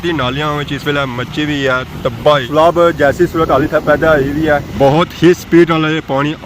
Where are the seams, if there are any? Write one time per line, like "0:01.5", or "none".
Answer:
0:02.5
0:04.7

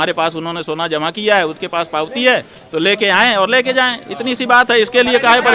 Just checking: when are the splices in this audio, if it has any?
none

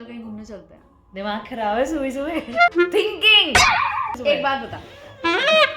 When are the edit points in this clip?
0:02.7
0:04.2

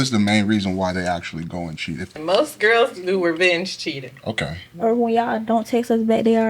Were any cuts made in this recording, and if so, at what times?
0:02.2

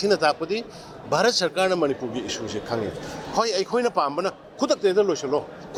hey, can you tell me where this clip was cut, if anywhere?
none

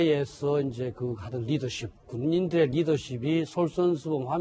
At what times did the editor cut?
none

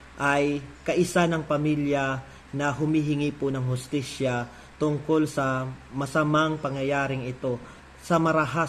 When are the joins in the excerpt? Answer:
0:07.7

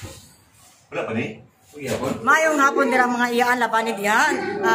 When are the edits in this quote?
0:02.2

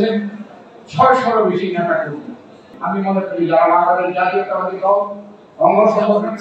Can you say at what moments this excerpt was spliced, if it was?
0:02.8

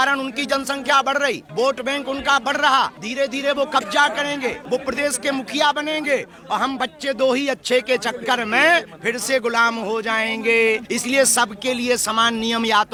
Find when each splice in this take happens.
none

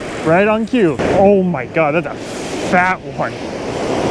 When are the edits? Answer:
0:01.0

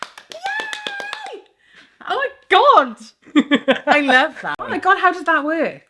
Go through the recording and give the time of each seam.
0:04.6

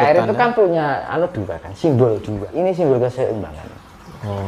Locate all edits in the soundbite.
0:02.5

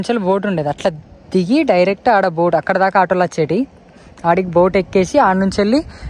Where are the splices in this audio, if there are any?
none

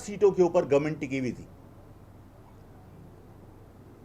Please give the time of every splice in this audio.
none

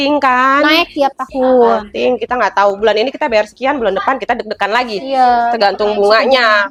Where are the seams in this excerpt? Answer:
none

